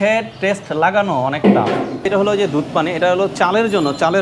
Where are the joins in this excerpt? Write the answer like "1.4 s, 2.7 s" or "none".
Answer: 2.1 s, 3.3 s